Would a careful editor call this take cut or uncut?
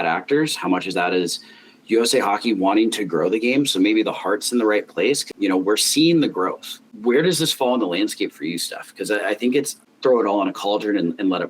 cut